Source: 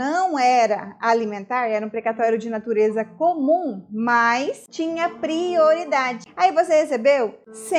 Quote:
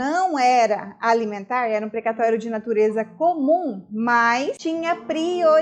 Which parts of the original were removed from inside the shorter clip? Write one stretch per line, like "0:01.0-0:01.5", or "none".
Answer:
0:04.6-0:04.7

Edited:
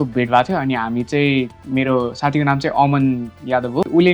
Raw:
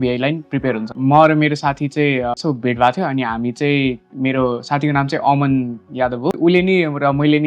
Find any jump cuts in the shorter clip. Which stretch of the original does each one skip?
none

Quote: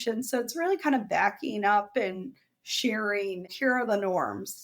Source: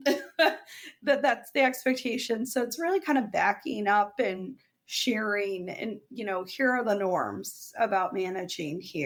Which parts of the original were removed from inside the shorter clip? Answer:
0:05.7-0:06.5

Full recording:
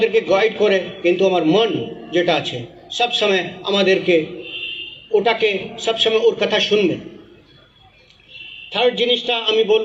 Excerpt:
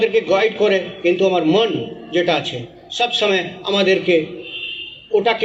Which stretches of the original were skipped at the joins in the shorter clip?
none

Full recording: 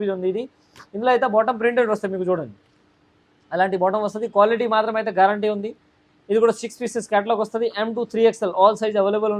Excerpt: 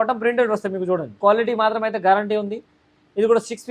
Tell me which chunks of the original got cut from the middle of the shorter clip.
0:02.5-0:04.2

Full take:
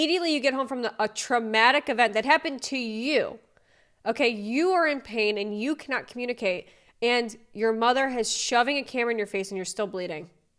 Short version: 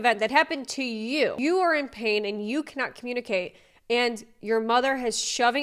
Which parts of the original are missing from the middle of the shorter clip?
0:03.3-0:04.5

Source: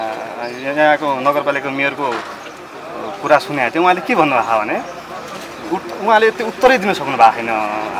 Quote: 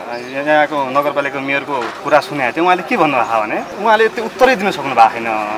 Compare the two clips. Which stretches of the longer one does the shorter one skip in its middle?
0:02.3-0:03.2
0:04.9-0:05.9

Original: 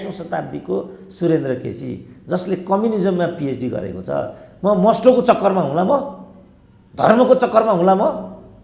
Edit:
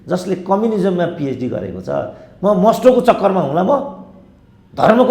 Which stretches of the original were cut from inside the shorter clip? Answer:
none

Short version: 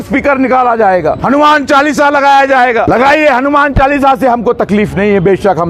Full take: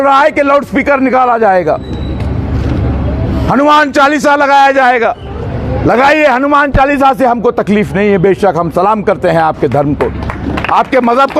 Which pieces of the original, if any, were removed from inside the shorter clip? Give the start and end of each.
0:01.8-0:03.5
0:05.1-0:05.8

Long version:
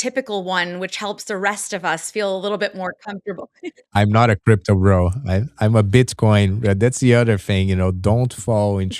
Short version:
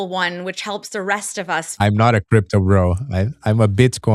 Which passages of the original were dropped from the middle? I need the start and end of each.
0:02.0-0:03.8

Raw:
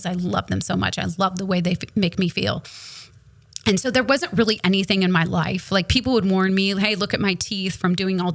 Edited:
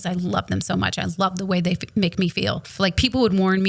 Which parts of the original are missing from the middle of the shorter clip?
0:02.7-0:05.6

